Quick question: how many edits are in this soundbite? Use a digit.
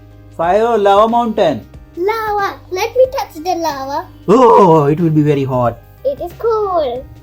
1